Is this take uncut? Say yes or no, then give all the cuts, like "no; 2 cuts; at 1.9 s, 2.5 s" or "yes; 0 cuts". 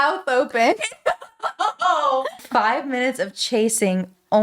no; 1 cut; at 2.4 s